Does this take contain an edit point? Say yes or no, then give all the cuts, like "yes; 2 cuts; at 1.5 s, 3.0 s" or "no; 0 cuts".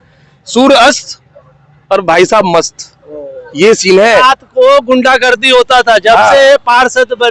yes; 1 cut; at 4.2 s